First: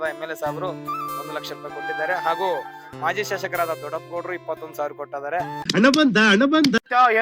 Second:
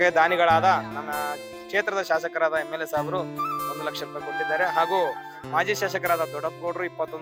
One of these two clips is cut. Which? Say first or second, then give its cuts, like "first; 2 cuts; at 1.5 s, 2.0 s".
first; 1 cut; at 5.6 s